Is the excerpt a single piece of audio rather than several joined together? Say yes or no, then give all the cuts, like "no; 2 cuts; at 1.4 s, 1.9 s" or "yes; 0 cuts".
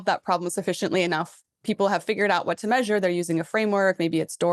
yes; 0 cuts